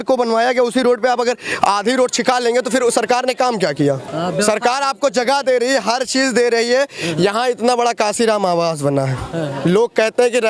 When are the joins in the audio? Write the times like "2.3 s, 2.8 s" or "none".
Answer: 4.1 s